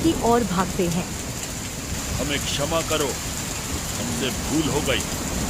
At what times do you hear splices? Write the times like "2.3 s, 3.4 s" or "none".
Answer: 1.9 s

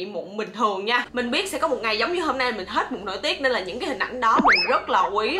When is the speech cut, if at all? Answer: 1.1 s

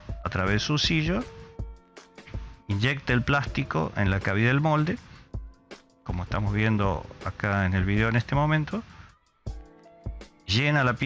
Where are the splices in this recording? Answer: none

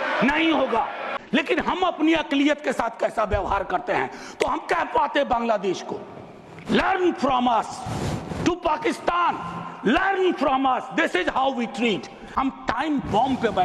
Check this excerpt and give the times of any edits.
1.1 s, 12.2 s

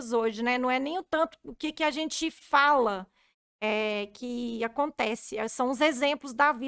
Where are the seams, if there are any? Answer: none

